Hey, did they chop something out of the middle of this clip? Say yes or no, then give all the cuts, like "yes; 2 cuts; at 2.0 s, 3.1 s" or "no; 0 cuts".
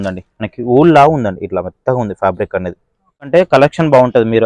yes; 1 cut; at 3.3 s